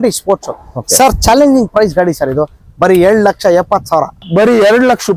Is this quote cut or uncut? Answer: cut